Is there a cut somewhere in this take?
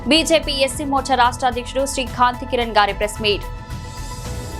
yes; 1 cut; at 3.4 s

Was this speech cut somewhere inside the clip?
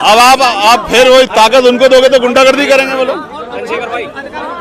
no; 0 cuts

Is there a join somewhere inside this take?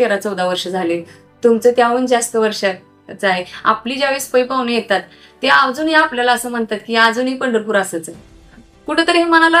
no; 0 cuts

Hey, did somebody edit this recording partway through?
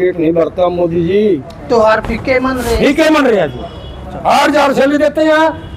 yes; 1 cut; at 1.3 s

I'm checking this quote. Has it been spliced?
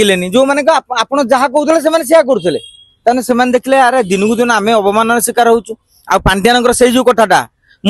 no; 0 cuts

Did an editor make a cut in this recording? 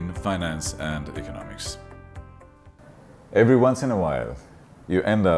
yes; 1 cut; at 2.7 s

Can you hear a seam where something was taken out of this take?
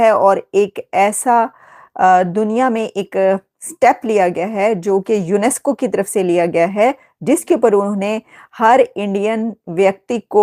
no; 0 cuts

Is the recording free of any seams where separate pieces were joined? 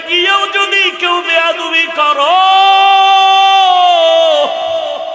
yes; 0 cuts

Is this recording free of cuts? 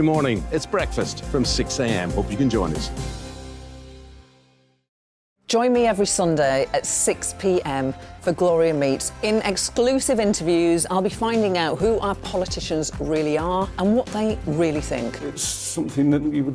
no; 1 cut; at 5.1 s

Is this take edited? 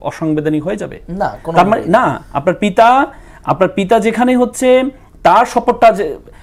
no; 0 cuts

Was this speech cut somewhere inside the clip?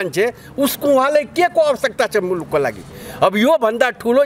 no; 0 cuts

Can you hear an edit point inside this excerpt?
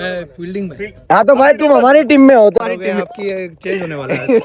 yes; 1 cut; at 2.6 s

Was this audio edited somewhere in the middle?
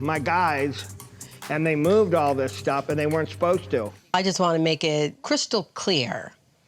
yes; 2 cuts; at 4.0 s, 5.2 s

